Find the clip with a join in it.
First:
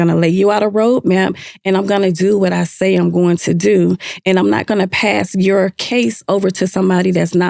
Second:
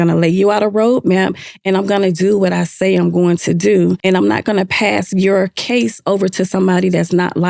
second; 1 cut; at 4.0 s

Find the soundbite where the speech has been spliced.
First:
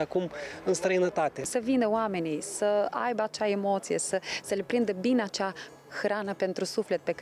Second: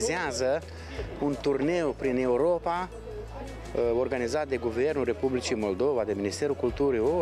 first; 1 cut; at 1.5 s

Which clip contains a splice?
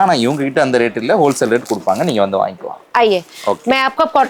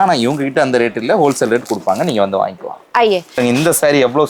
second; 1 cut; at 3.4 s

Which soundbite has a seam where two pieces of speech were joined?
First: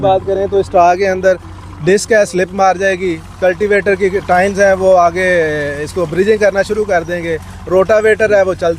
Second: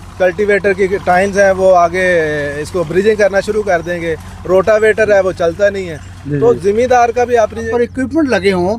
second; 1 cut; at 7.7 s

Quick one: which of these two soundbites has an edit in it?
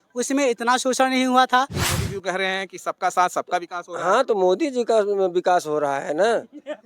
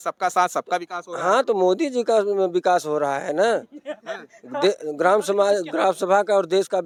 first; 1 cut; at 1.8 s

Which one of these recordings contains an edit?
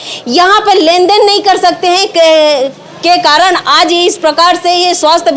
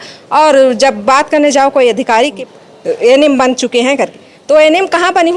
second; 1 cut; at 2.4 s

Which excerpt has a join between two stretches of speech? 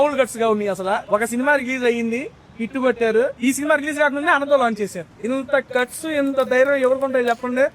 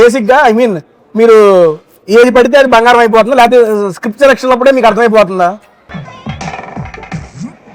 first; 3 cuts; at 1.0 s, 3.3 s, 5.1 s

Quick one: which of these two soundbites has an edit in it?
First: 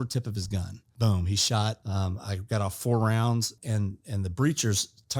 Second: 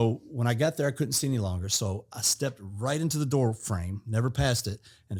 first; 3 cuts; at 0.9 s, 1.8 s, 3.6 s

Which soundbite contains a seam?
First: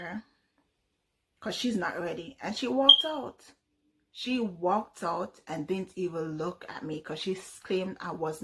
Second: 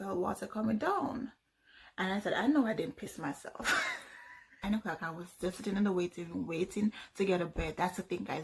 second; 1 cut; at 4.6 s

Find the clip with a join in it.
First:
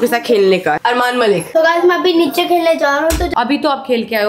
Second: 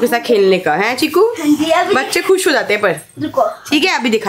first; 2 cuts; at 1.0 s, 3.3 s

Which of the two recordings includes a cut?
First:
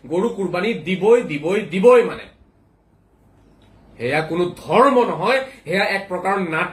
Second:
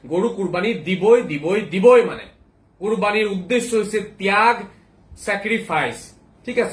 second; 1 cut; at 2.7 s

